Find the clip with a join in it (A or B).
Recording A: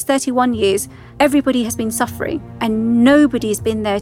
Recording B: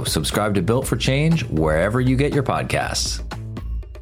A